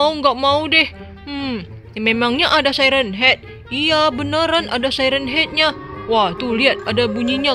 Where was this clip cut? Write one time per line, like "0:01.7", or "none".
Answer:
none